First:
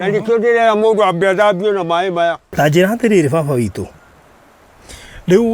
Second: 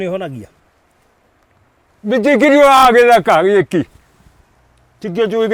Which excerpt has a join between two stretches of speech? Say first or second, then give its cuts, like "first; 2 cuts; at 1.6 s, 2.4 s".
first; 1 cut; at 2.5 s